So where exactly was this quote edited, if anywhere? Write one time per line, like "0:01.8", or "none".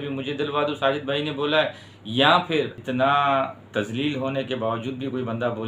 0:02.8